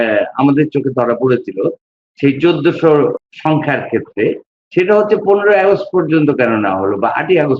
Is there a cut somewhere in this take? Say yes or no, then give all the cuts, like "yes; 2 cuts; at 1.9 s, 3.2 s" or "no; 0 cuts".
yes; 1 cut; at 3.2 s